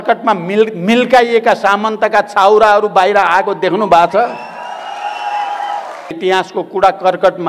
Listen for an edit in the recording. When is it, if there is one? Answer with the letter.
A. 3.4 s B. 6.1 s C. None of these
B